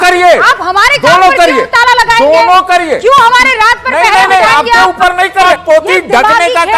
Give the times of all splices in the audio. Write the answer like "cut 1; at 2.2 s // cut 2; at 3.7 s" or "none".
cut 1; at 5.5 s